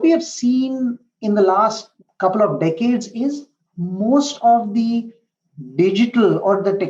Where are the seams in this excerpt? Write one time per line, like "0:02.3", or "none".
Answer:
0:01.9